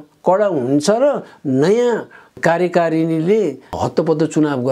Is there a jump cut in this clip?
yes; 2 cuts; at 2.3 s, 3.7 s

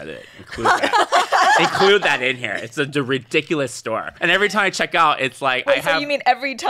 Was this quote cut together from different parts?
yes; 1 cut; at 4.1 s

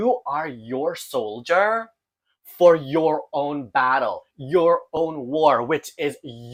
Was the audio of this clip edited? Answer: no; 0 cuts

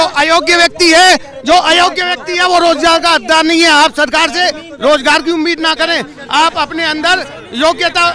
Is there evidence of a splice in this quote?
no; 0 cuts

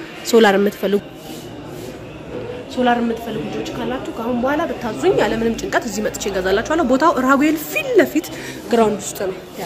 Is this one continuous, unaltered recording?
no; 1 cut; at 2.3 s

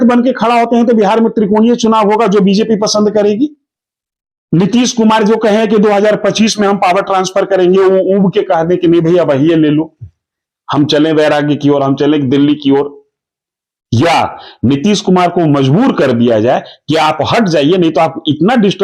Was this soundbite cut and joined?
yes; 1 cut; at 3.6 s

